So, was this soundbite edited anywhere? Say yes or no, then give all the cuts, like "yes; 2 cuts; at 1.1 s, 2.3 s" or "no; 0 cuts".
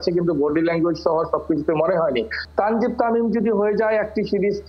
yes; 1 cut; at 2.3 s